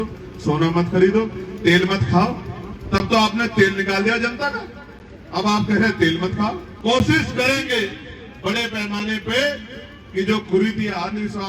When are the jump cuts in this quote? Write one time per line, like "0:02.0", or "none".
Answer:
0:06.7